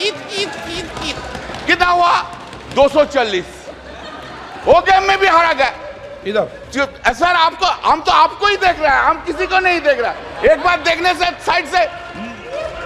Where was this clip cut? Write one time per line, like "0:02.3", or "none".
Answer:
none